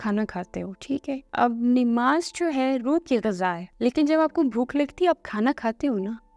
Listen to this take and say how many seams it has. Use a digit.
2